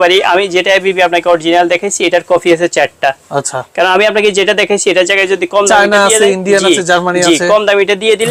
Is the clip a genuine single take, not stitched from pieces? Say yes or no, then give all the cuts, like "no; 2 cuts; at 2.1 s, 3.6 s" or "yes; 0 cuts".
yes; 0 cuts